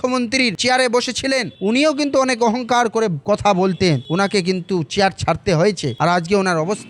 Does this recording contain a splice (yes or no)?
no